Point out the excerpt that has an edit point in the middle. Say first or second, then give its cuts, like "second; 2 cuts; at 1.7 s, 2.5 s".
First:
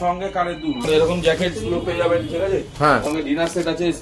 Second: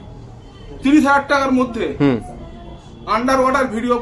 first; 2 cuts; at 0.8 s, 3.0 s